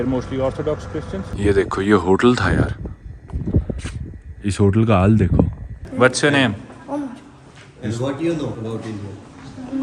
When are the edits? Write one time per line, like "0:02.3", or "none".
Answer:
0:01.3
0:05.8
0:08.6